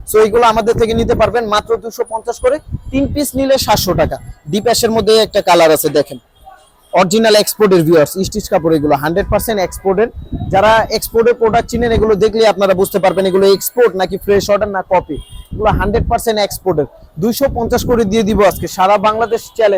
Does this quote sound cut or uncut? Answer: uncut